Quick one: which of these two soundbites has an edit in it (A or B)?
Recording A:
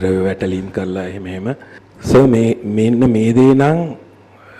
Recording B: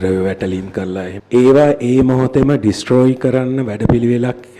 B